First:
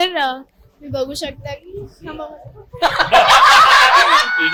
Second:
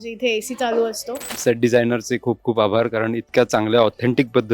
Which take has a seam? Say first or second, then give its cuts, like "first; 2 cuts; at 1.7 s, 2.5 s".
second; 1 cut; at 1.3 s